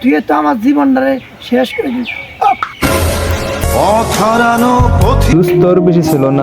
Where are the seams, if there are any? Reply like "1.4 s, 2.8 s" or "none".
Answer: 5.3 s